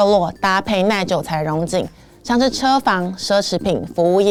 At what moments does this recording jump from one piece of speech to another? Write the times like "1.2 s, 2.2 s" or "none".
none